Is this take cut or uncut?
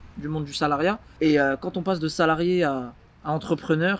cut